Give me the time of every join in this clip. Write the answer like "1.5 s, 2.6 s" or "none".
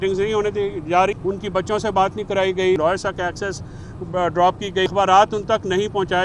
1.1 s, 2.8 s, 4.9 s

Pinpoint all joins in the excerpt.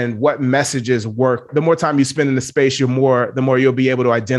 1.5 s

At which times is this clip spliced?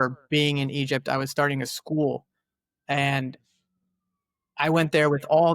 none

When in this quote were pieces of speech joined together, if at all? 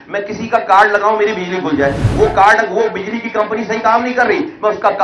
none

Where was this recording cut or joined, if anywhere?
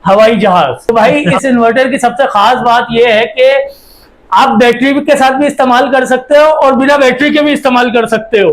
0.9 s

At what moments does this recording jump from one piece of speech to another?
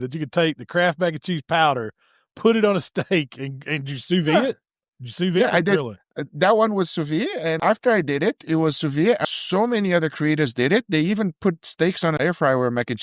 7.6 s, 9.2 s, 12.2 s

